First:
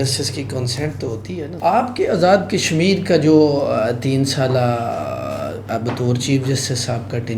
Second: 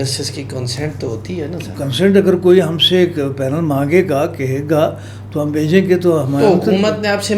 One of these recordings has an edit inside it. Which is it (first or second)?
first